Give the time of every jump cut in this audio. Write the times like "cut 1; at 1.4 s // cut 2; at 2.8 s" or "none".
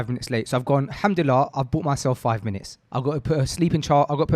cut 1; at 2.8 s